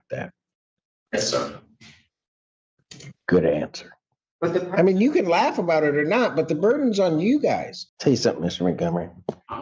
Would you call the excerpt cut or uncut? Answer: cut